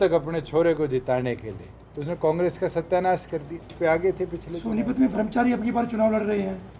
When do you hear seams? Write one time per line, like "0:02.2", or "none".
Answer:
0:03.7